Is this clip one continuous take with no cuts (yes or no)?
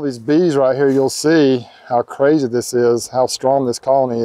yes